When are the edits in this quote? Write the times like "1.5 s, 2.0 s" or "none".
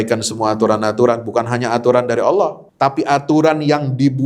2.6 s